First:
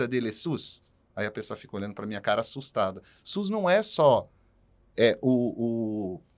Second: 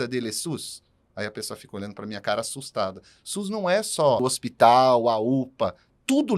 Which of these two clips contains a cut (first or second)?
second